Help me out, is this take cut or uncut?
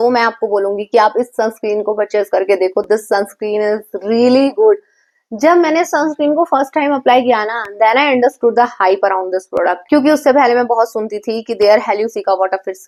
uncut